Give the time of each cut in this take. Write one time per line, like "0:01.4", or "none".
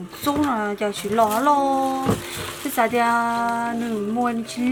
none